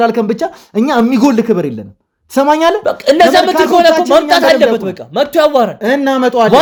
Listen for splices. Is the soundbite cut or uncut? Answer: uncut